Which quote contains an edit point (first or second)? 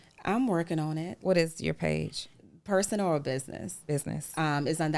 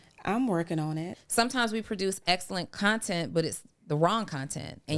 second